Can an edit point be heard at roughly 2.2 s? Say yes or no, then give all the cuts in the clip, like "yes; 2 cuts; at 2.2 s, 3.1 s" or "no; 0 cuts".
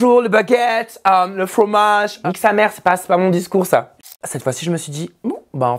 yes; 2 cuts; at 2.2 s, 3.9 s